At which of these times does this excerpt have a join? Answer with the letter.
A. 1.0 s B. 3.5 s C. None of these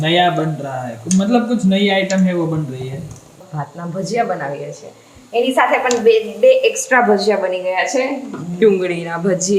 B